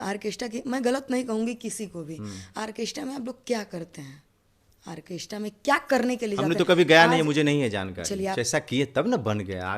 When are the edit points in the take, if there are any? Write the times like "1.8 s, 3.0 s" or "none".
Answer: 8.3 s

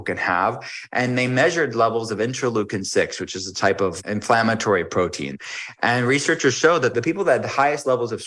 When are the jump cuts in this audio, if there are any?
4.0 s, 5.4 s, 6.9 s

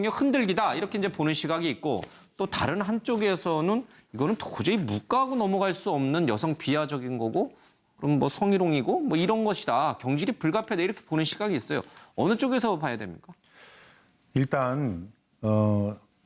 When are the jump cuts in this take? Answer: 5.4 s

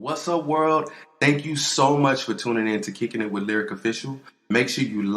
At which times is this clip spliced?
0.9 s

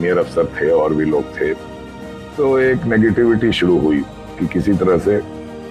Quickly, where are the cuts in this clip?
none

